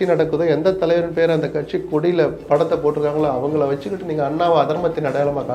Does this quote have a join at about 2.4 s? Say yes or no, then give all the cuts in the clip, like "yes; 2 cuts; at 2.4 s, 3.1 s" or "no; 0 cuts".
yes; 1 cut; at 2.4 s